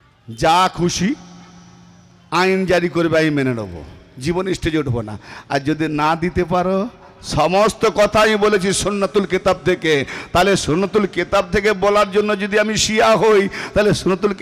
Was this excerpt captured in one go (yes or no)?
yes